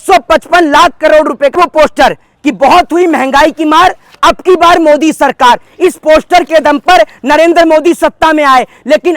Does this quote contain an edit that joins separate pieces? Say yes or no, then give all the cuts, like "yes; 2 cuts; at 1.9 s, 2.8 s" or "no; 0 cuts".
yes; 1 cut; at 1.6 s